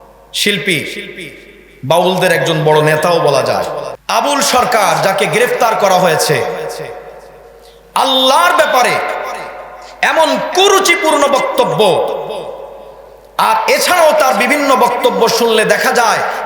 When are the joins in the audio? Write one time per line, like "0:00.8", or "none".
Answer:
0:03.9